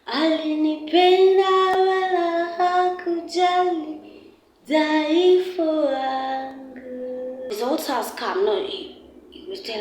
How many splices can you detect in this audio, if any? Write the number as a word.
one